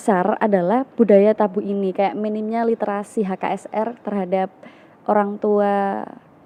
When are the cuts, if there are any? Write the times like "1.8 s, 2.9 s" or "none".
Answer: none